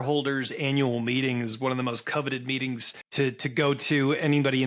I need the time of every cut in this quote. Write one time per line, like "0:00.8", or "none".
0:03.0